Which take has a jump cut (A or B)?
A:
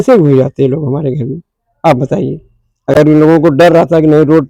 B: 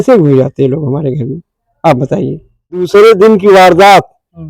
B